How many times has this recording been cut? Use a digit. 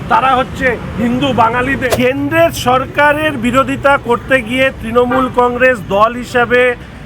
1